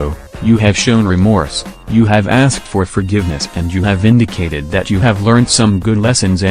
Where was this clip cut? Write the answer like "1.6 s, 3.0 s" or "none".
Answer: none